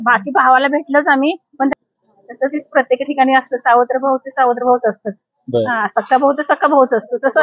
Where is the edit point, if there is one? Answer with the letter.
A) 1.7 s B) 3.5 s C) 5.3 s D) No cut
A